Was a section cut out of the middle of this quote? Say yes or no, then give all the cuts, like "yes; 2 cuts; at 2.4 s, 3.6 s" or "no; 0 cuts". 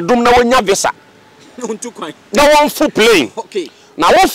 no; 0 cuts